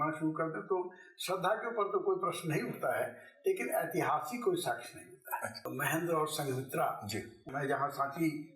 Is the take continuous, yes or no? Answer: no